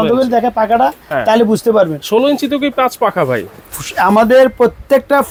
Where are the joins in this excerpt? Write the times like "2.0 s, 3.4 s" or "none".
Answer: none